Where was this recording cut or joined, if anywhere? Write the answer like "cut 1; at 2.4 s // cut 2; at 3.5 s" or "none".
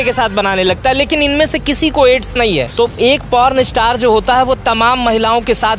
cut 1; at 2.7 s